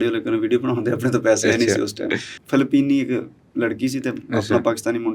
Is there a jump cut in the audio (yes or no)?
yes